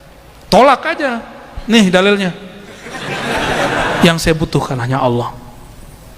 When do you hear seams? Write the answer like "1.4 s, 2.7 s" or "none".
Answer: 3.9 s